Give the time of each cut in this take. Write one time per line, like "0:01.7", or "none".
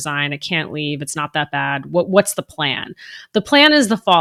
none